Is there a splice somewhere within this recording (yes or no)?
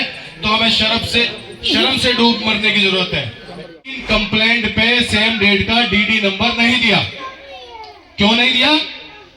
yes